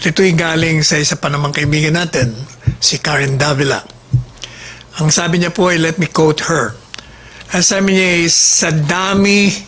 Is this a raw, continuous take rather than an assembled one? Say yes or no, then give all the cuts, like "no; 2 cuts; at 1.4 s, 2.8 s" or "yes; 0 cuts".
yes; 0 cuts